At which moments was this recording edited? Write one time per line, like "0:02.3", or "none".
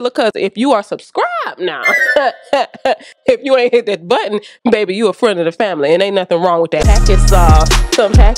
0:06.8

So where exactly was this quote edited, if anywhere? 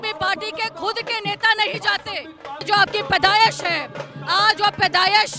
0:02.7

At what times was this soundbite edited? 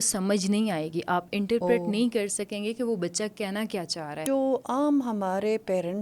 0:04.2

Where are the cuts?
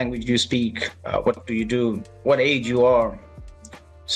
0:01.5

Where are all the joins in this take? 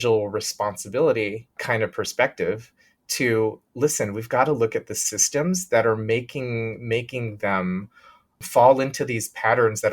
0:01.6

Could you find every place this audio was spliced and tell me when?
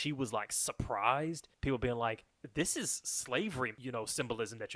0:01.5
0:02.3
0:03.8

